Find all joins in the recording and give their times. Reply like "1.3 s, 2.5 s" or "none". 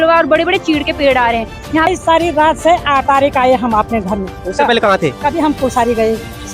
1.9 s